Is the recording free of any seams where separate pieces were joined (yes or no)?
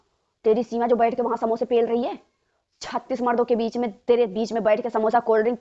yes